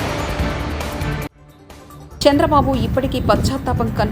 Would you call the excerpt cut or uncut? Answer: cut